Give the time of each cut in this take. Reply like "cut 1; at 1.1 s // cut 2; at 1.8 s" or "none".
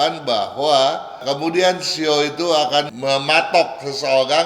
cut 1; at 1.1 s // cut 2; at 2.9 s